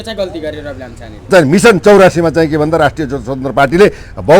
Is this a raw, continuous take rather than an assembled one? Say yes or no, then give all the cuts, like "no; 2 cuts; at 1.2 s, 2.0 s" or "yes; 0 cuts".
no; 1 cut; at 1.3 s